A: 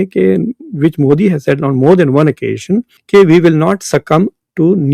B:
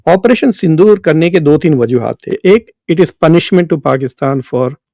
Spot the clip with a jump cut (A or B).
B